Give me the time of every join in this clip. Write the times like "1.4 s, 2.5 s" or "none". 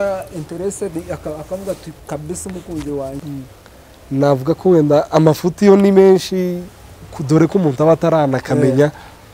3.2 s